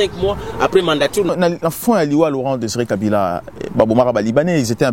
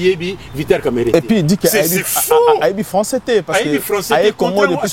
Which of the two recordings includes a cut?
first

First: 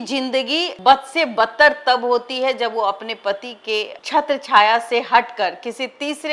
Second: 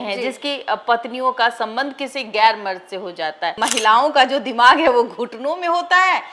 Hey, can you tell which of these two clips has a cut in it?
second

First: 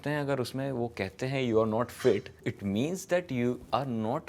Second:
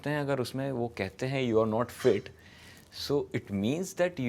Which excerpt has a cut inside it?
first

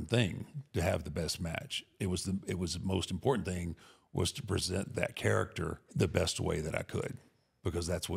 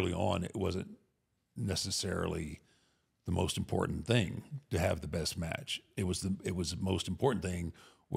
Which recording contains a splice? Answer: first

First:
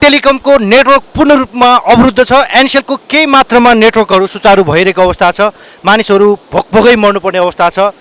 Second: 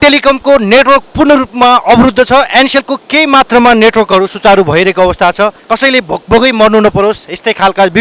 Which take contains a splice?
second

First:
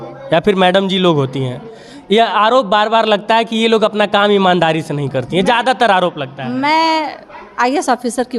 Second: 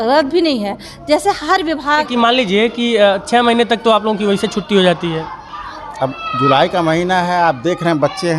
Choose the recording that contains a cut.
second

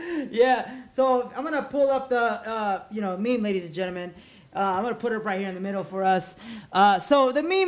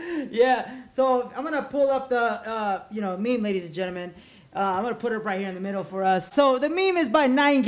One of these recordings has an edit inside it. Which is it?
second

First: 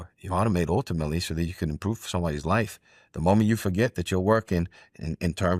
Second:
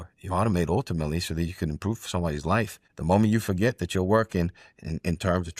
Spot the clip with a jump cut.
second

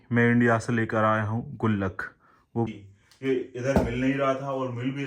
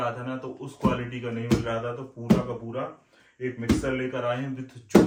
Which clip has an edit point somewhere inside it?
first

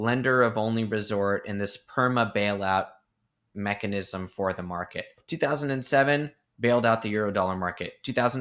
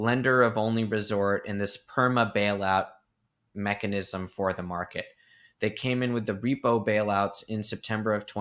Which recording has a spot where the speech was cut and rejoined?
first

